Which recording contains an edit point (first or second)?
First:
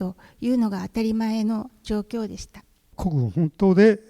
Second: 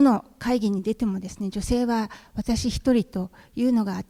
first